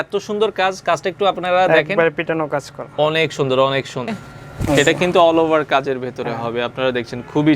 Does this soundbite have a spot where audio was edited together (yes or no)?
yes